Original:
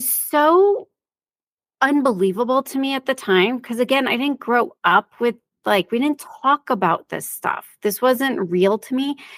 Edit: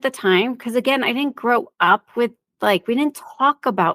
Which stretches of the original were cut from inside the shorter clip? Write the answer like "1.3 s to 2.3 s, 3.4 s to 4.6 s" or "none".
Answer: none